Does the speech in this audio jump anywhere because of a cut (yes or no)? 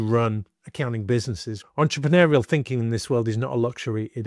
yes